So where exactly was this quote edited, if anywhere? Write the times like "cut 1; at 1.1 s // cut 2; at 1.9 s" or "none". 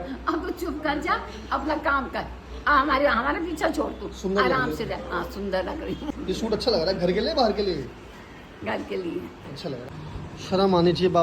cut 1; at 6.1 s // cut 2; at 9.8 s